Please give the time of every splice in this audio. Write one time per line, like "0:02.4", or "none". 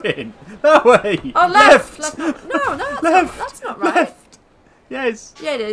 none